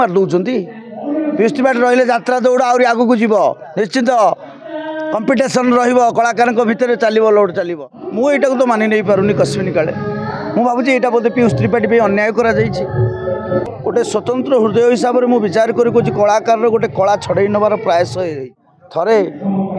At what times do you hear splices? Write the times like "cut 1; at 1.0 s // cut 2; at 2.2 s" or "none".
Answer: cut 1; at 7.7 s // cut 2; at 13.7 s // cut 3; at 18.6 s